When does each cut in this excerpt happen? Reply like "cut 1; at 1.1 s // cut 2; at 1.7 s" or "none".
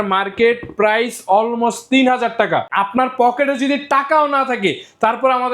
cut 1; at 2.7 s